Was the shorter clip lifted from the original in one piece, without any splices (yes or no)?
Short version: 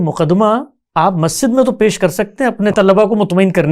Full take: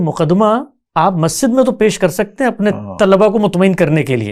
no